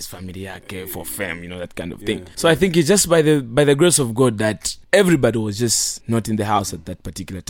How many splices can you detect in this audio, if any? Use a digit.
3